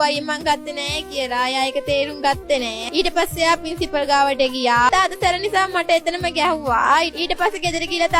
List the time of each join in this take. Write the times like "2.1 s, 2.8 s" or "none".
2.8 s, 4.9 s